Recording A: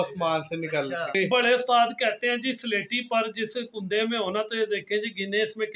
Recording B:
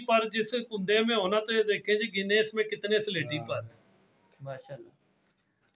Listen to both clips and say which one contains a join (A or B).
A